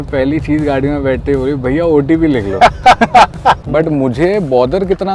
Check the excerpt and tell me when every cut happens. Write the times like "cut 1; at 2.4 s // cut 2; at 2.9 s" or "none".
cut 1; at 3.6 s